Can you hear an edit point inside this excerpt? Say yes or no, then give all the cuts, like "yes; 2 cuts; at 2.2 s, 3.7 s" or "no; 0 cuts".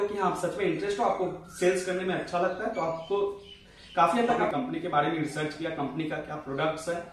yes; 1 cut; at 4.5 s